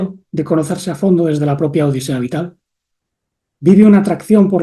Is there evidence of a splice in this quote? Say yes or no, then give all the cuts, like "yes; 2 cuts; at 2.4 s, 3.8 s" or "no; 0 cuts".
no; 0 cuts